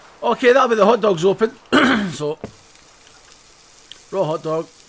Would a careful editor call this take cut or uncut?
uncut